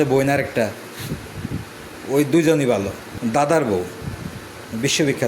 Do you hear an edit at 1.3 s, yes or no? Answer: no